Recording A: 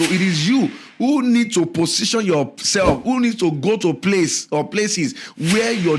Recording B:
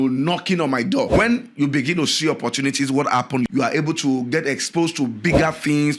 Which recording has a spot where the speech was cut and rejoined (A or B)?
B